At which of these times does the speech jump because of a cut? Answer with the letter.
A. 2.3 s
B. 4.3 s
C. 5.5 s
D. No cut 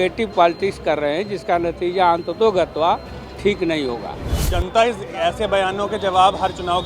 B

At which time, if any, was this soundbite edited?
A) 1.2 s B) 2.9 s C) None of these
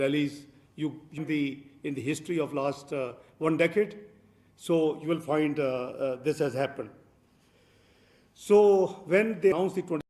A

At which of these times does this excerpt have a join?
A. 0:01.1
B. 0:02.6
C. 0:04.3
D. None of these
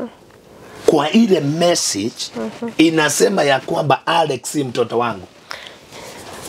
D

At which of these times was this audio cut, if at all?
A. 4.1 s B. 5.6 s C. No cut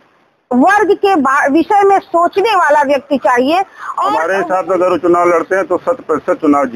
A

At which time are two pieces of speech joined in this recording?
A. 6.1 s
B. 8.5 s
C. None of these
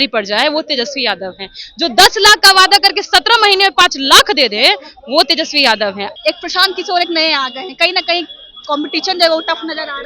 A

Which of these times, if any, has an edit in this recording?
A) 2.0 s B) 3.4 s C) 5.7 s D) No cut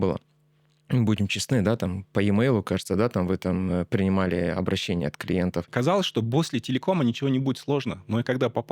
C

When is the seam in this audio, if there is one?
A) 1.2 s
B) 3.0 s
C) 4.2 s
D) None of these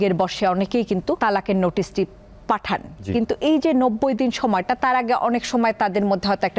A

